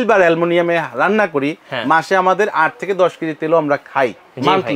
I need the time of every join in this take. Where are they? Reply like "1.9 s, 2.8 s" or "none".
none